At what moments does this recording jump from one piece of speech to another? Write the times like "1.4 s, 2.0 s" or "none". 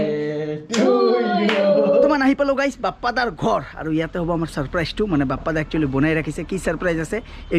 2.1 s